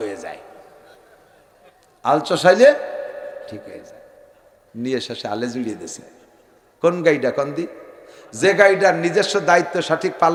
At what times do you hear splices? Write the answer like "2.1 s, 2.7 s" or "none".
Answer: none

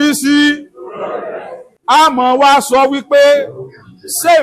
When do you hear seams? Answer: 2.0 s

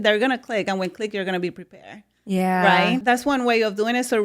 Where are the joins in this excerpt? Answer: 3.0 s

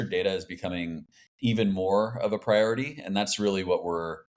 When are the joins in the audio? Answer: none

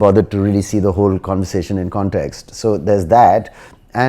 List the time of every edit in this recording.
none

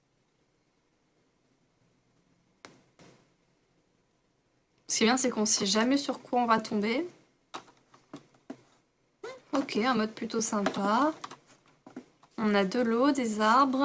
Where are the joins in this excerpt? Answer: 5.1 s

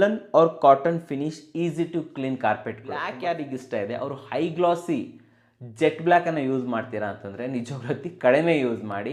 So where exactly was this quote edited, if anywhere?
3.1 s

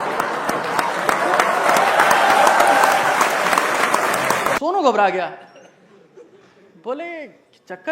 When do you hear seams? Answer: 4.6 s

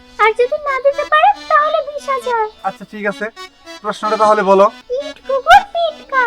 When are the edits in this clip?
4.8 s

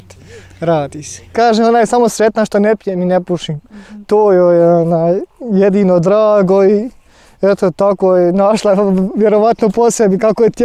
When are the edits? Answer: 1.3 s

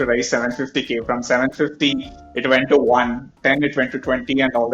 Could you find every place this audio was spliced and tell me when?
3.4 s

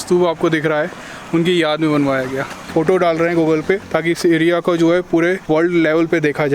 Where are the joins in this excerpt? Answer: 2.6 s, 3.9 s, 5.4 s

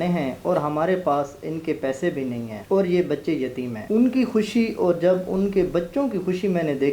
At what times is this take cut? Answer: 2.5 s, 3.7 s

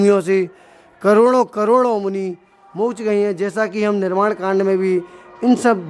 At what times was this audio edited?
none

